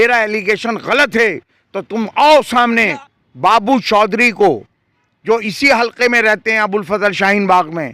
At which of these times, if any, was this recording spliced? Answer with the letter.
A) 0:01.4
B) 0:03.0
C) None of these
B